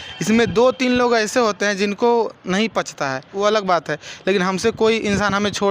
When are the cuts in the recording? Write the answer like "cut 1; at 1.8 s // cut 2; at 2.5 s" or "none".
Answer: cut 1; at 3.3 s